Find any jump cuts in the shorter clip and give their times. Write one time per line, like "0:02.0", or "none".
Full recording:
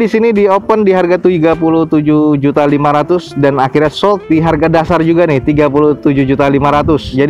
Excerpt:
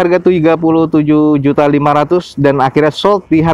none

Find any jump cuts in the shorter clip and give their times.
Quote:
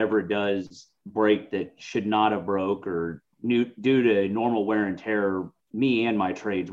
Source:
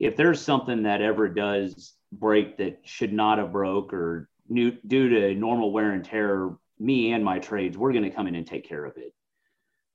none

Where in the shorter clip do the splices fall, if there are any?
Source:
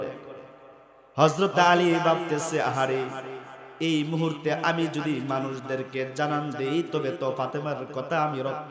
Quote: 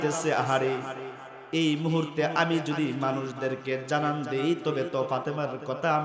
none

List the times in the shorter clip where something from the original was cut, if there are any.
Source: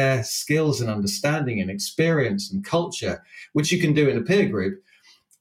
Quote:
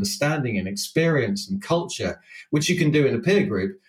none

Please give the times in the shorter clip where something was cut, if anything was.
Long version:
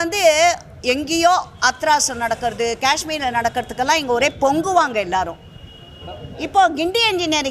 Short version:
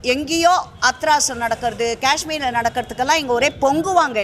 none

